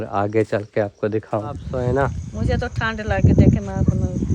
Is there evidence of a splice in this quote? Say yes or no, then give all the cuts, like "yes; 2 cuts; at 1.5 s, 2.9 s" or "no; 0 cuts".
yes; 1 cut; at 1.7 s